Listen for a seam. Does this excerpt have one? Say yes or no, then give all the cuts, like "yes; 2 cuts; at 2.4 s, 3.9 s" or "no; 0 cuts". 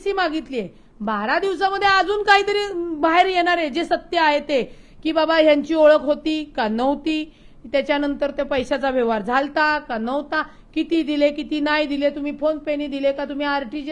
no; 0 cuts